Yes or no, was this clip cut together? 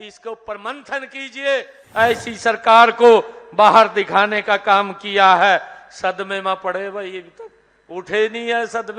yes